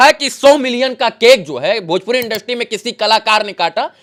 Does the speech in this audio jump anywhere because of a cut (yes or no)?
no